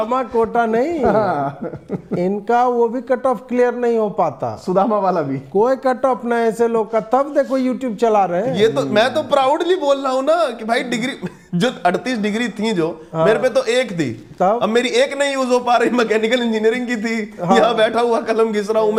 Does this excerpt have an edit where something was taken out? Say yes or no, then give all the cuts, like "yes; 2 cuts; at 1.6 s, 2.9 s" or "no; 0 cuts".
no; 0 cuts